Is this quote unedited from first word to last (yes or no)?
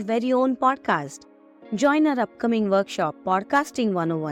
yes